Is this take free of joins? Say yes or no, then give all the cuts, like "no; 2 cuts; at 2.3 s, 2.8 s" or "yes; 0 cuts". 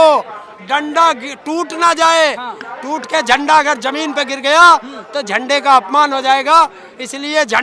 yes; 0 cuts